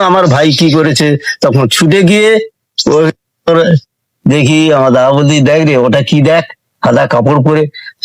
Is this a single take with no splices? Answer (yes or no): no